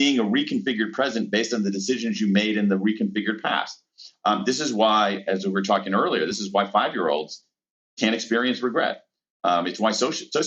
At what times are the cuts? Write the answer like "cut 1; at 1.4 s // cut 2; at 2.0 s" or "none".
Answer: none